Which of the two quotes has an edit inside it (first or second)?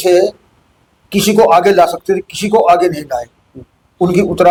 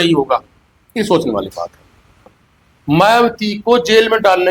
second